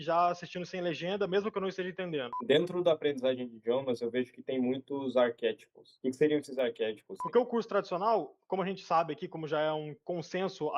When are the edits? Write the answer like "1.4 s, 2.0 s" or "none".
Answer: 2.3 s, 7.2 s